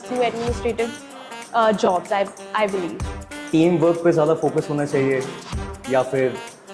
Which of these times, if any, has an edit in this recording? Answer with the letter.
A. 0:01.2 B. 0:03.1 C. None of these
B